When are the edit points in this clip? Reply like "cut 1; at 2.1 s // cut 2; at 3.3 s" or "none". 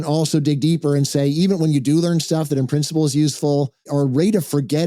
cut 1; at 3.9 s